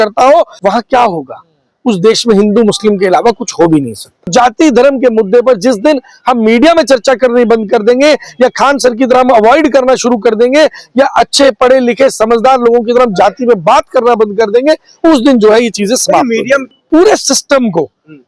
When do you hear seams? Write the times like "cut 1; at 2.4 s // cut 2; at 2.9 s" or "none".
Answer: cut 1; at 4.3 s // cut 2; at 16.8 s